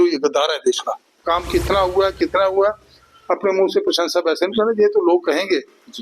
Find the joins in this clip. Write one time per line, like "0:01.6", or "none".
0:01.1